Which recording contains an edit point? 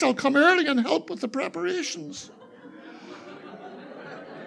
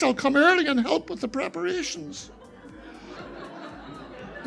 second; 1 cut; at 3.2 s

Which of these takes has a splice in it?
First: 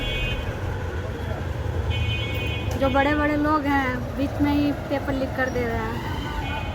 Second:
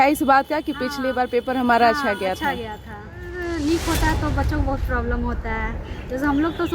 second; 1 cut; at 3.4 s

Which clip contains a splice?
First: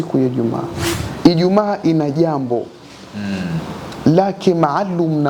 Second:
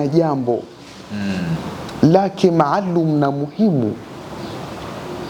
first; 1 cut; at 1.0 s

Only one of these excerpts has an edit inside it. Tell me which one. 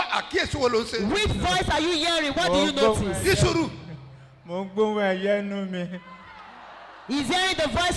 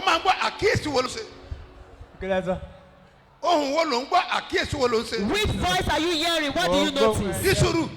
second; 1 cut; at 1.0 s

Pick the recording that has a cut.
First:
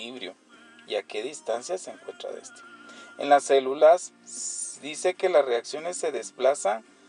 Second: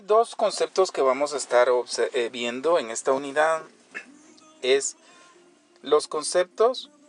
first; 1 cut; at 3.6 s

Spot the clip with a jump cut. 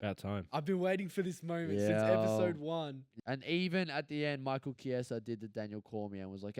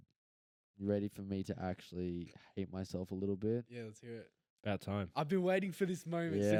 first; 1 cut; at 3.0 s

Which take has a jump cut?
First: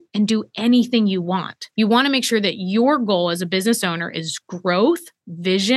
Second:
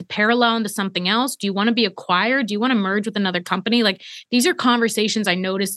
first; 1 cut; at 1.6 s

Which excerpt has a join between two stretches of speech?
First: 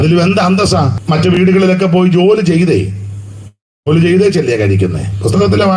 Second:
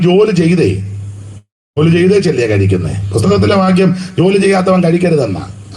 first; 1 cut; at 1.0 s

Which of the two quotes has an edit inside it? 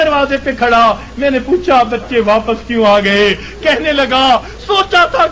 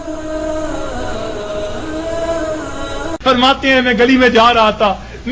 first; 1 cut; at 4.1 s

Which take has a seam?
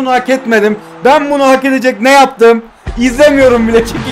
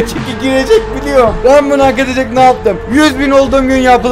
second; 2 cuts; at 1.4 s, 2.8 s

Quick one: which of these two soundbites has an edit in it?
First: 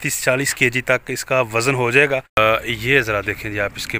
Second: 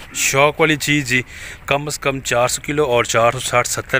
first; 1 cut; at 2.4 s

